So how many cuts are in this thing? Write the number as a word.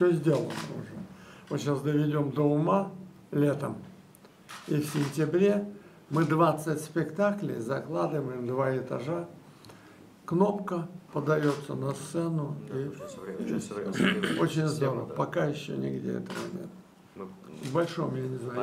one